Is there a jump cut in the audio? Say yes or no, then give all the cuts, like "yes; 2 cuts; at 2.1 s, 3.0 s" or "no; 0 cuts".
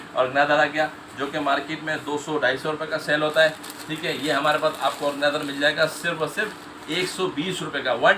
no; 0 cuts